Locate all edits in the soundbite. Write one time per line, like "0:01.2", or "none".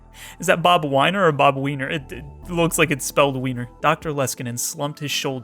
0:03.7